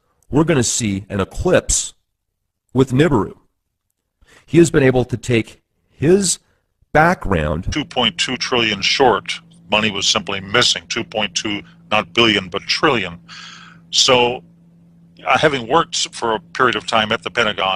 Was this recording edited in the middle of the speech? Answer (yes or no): no